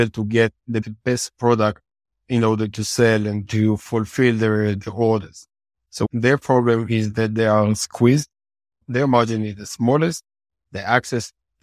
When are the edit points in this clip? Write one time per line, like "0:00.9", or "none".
0:00.8
0:06.1
0:08.8

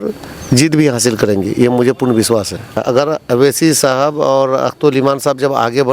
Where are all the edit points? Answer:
0:02.8

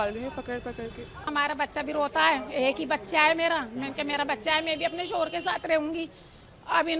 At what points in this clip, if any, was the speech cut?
0:01.3

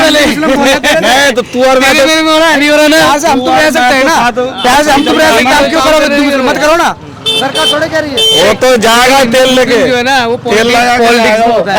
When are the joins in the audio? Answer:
none

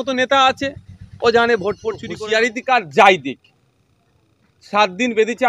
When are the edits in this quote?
0:02.1

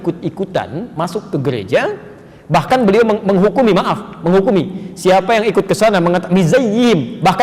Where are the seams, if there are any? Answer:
none

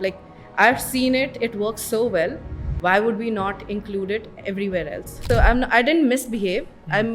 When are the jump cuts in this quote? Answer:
0:05.1

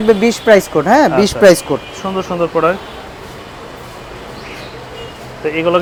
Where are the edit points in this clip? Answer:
none

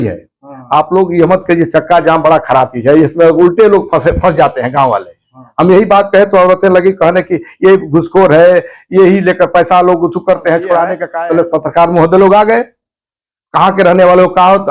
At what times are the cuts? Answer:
0:11.0

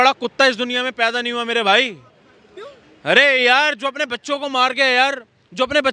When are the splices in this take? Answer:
none

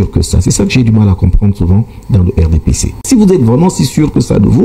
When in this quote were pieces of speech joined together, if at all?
0:03.0

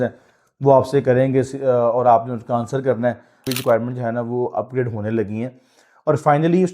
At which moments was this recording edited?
0:03.5

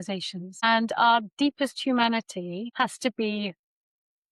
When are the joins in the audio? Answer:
none

